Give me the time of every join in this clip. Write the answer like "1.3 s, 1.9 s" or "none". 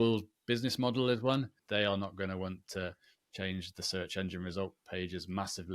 1.6 s